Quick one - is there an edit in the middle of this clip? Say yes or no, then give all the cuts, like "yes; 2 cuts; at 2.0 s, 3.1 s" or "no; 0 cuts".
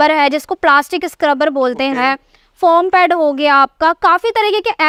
no; 0 cuts